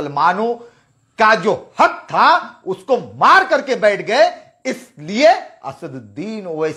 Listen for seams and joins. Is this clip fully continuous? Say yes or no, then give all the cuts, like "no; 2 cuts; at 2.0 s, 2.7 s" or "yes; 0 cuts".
yes; 0 cuts